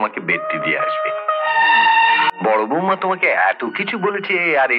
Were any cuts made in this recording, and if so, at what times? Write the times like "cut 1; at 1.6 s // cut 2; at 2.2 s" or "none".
cut 1; at 2.3 s